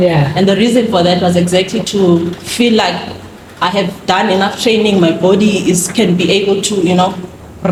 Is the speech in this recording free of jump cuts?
yes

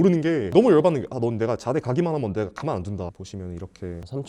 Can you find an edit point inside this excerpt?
yes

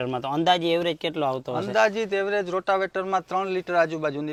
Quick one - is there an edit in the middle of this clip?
no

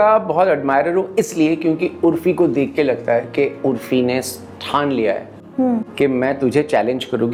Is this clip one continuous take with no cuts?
yes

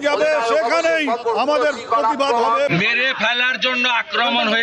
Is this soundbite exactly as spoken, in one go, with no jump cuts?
no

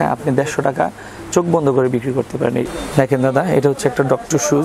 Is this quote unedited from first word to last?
no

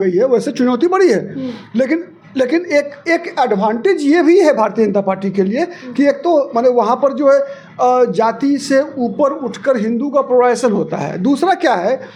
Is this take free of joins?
yes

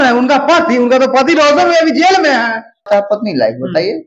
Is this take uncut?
no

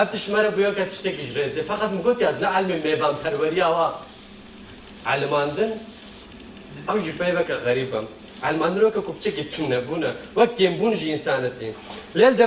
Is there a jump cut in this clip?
yes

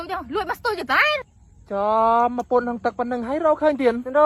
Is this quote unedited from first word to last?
yes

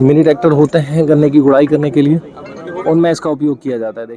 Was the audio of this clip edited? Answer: no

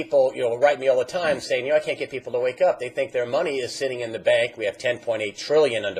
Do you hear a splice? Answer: yes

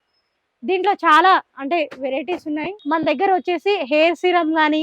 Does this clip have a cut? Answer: yes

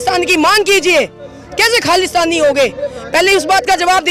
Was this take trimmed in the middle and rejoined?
no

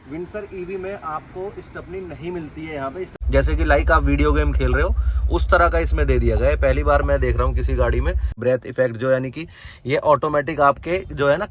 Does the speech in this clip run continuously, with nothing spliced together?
no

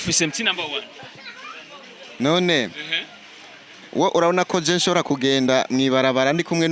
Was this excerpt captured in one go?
yes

